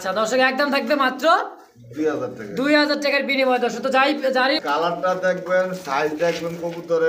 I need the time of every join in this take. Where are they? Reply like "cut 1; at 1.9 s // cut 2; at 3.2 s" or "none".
cut 1; at 4.6 s

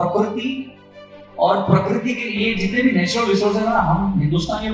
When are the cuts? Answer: none

